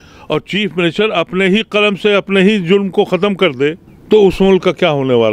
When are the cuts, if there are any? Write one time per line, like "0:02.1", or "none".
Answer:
0:03.9